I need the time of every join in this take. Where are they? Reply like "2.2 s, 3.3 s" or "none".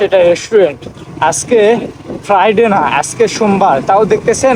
none